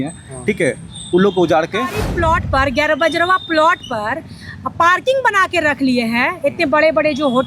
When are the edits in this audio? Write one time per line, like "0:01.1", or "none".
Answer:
0:02.0